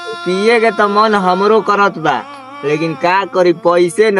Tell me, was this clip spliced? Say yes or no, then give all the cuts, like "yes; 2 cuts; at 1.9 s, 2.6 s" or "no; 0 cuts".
no; 0 cuts